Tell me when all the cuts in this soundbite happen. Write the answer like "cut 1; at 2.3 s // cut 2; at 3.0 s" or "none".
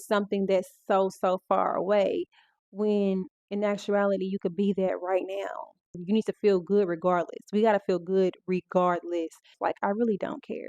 cut 1; at 6.0 s // cut 2; at 9.6 s